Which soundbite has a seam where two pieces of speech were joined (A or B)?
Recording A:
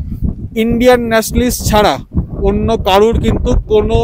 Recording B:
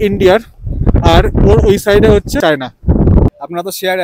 B